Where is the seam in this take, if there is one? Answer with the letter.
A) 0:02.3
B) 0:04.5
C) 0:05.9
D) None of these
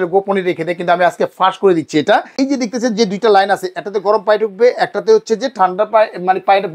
A